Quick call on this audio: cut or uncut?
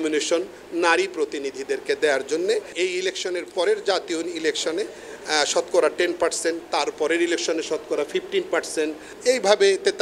cut